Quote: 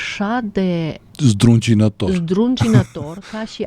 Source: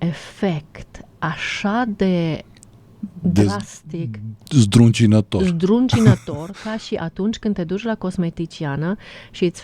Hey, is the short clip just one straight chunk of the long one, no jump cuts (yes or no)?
no